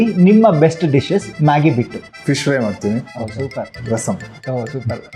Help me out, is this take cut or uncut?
cut